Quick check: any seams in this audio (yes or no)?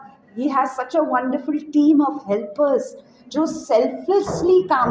no